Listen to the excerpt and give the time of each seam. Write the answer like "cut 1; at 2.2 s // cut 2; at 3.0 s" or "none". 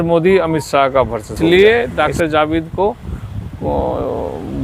cut 1; at 1.3 s